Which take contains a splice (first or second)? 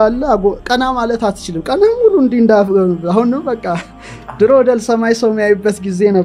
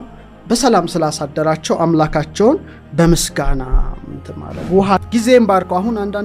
second